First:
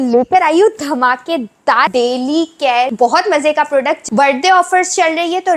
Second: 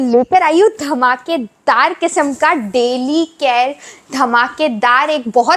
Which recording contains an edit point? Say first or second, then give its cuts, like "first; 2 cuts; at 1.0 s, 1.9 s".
first; 3 cuts; at 1.9 s, 2.9 s, 4.0 s